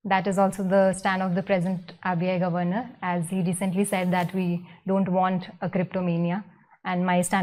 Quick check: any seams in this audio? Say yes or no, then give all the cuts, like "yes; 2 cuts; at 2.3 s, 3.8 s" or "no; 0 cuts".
no; 0 cuts